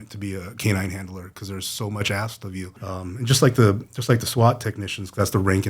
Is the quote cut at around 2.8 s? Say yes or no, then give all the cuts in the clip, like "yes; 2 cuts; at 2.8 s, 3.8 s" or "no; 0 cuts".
yes; 1 cut; at 2.8 s